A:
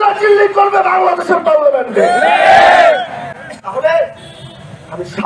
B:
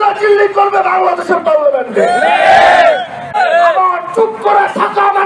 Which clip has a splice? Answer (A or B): B